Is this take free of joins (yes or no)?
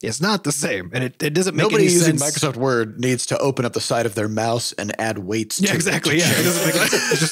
yes